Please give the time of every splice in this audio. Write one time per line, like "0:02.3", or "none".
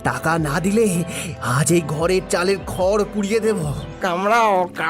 0:03.8

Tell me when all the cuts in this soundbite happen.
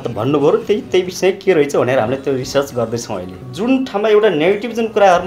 0:03.4

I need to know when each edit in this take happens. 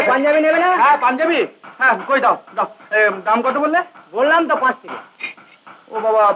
none

